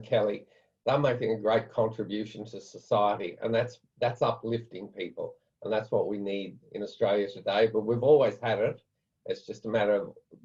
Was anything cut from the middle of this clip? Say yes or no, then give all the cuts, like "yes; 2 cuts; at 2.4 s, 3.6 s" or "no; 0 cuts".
no; 0 cuts